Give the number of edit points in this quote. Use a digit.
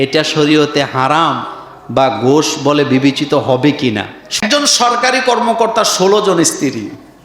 1